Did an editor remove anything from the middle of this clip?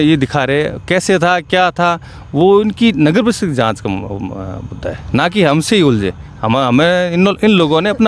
no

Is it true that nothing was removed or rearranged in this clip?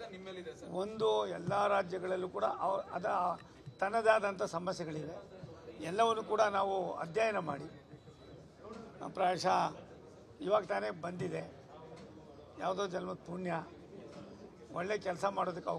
yes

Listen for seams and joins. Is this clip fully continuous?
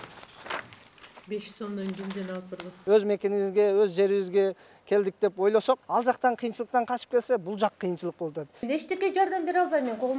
no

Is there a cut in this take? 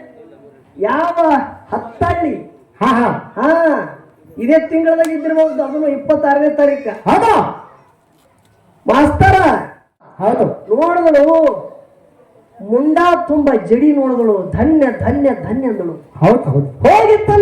yes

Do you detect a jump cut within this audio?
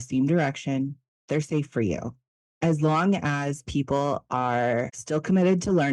yes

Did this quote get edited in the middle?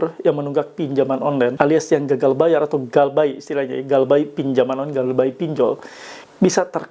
yes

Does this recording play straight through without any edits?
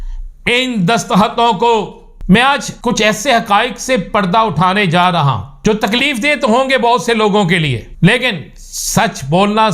no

